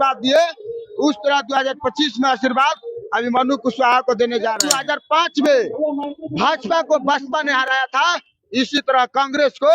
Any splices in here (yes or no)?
yes